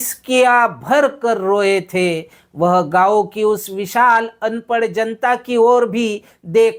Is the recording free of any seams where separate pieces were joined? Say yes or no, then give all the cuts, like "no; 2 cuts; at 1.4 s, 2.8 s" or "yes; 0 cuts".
yes; 0 cuts